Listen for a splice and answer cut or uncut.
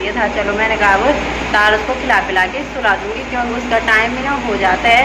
uncut